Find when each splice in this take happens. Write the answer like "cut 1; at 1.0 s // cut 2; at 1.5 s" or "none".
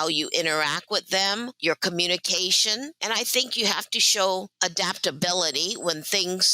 cut 1; at 1.5 s // cut 2; at 3.0 s // cut 3; at 4.5 s